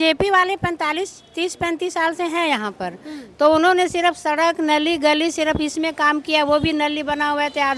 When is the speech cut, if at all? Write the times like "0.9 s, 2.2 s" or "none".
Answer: none